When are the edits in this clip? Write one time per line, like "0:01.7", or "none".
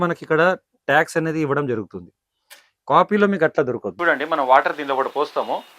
0:03.9